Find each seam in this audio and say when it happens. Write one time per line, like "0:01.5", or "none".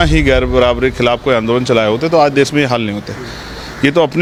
none